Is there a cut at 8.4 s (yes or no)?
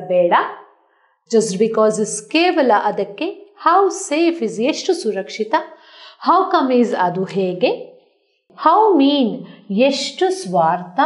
yes